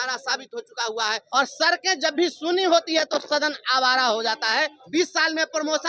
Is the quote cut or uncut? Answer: cut